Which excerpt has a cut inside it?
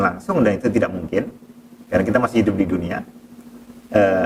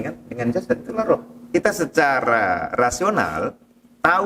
second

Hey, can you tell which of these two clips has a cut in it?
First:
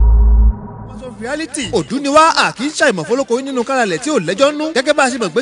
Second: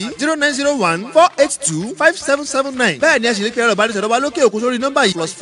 first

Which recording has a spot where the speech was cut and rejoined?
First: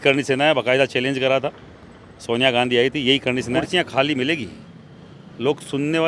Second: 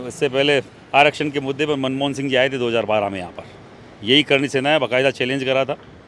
first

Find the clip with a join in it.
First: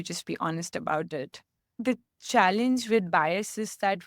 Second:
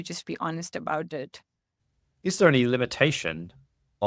first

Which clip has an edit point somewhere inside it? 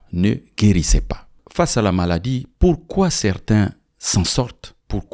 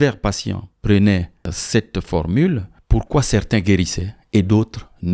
first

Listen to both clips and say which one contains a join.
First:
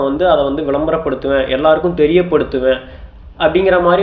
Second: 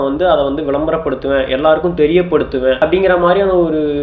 second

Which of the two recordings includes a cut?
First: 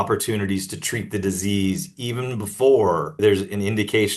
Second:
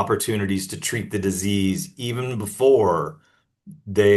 first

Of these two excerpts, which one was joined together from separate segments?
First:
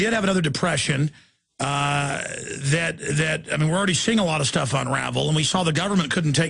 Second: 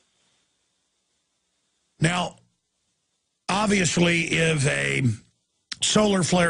second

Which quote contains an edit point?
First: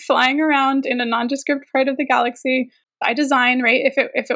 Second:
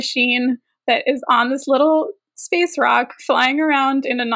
first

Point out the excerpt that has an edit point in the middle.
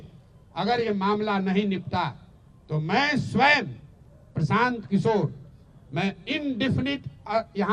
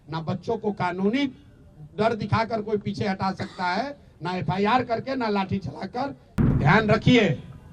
second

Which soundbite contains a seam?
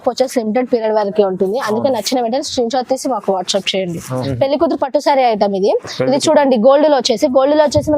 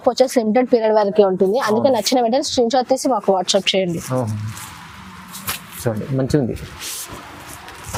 first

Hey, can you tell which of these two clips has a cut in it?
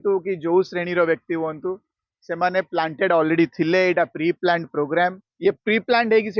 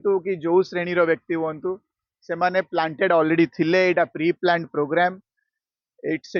first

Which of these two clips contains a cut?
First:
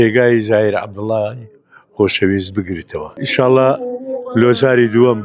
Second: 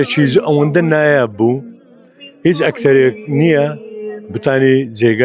first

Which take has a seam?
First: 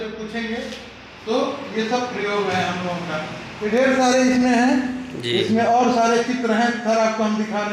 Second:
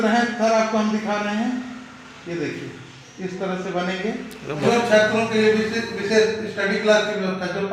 second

